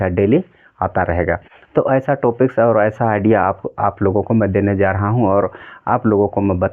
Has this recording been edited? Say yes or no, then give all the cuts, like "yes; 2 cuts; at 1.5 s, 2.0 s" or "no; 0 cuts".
no; 0 cuts